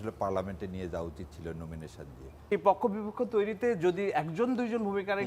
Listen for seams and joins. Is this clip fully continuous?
no; 1 cut; at 2.5 s

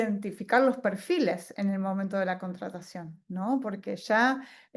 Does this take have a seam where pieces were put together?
no; 0 cuts

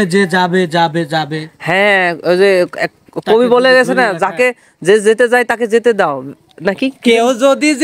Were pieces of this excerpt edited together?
no; 0 cuts

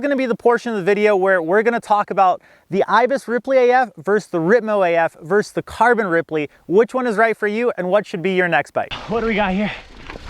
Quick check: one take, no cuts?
no; 1 cut; at 9.0 s

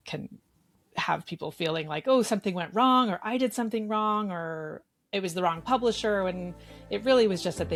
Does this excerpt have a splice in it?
no; 0 cuts

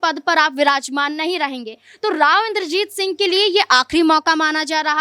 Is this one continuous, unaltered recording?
yes; 0 cuts

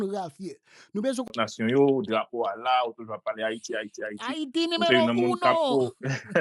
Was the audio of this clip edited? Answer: yes; 1 cut; at 1.3 s

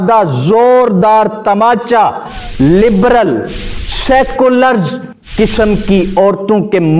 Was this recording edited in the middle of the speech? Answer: no; 0 cuts

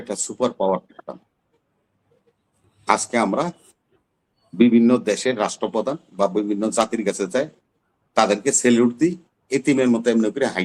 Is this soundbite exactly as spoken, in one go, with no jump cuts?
yes; 0 cuts

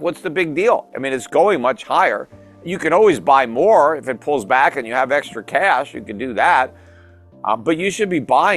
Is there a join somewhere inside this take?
no; 0 cuts

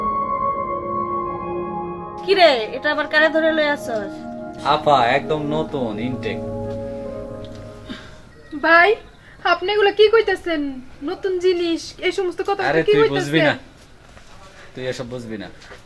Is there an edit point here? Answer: no; 0 cuts

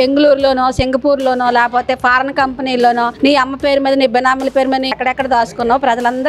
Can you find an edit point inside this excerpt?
yes; 1 cut; at 4.9 s

